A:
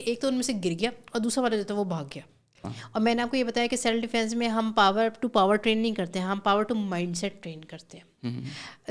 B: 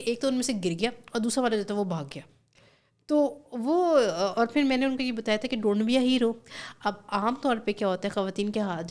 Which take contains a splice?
A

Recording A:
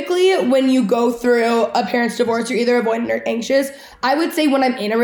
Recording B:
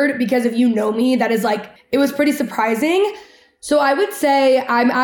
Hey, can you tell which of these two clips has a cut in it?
B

